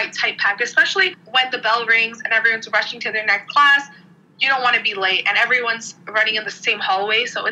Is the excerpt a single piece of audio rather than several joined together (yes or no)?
yes